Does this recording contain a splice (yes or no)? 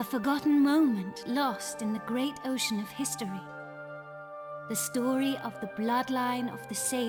no